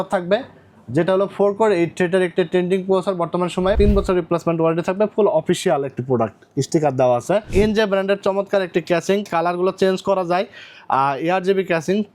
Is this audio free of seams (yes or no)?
no